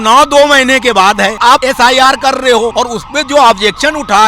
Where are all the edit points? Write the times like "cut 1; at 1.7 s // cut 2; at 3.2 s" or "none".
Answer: cut 1; at 1.5 s // cut 2; at 2.7 s